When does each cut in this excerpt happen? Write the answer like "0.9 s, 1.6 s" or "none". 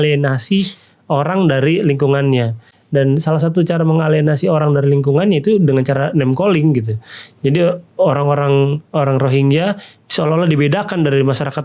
none